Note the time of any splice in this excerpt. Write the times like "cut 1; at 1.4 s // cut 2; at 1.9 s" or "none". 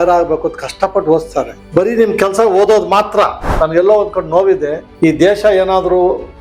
cut 1; at 1.5 s // cut 2; at 3.4 s